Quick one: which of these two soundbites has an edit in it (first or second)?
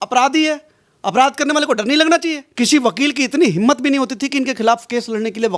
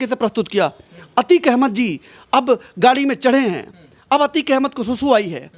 first